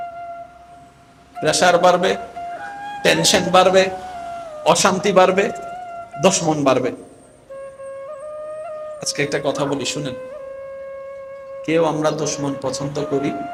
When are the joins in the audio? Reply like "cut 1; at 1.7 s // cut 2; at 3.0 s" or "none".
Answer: none